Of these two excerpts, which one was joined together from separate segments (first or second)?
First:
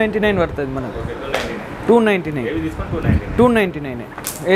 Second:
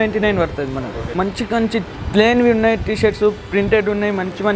second